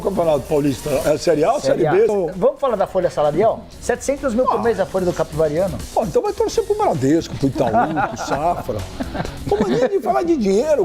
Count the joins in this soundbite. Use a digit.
1